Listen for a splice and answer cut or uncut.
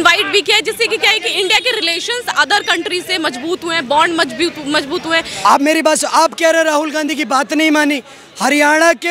cut